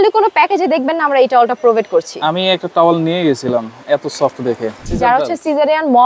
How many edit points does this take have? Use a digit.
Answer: 1